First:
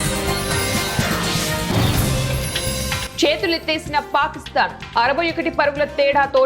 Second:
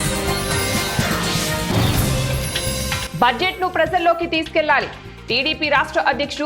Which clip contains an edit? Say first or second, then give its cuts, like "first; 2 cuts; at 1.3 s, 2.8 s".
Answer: first; 1 cut; at 3.0 s